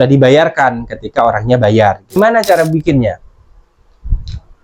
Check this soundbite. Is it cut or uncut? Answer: cut